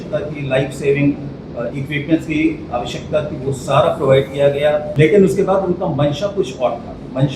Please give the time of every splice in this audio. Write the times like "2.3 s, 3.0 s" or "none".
4.9 s